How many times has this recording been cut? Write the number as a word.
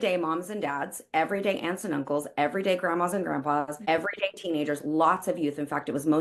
one